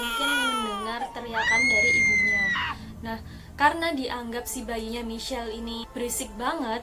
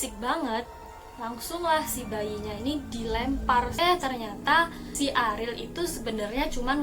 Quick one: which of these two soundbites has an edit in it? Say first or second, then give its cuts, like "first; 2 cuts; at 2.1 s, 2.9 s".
second; 1 cut; at 3.7 s